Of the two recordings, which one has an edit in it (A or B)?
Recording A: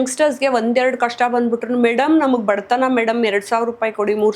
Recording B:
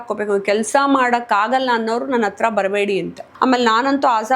B